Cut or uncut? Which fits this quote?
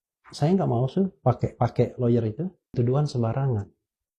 cut